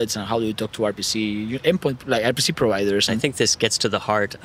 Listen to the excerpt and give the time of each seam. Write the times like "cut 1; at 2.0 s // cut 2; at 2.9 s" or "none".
cut 1; at 3.2 s